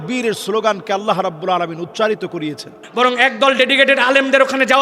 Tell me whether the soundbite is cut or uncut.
cut